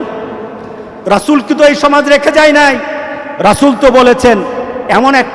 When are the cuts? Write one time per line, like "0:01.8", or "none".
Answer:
none